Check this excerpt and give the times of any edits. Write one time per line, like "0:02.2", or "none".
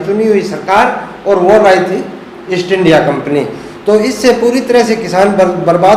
none